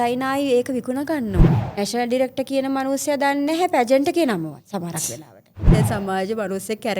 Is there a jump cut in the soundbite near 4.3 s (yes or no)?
no